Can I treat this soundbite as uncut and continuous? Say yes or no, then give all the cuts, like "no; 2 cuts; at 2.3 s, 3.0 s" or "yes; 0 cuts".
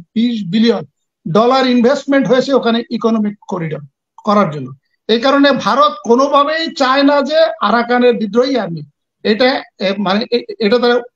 yes; 0 cuts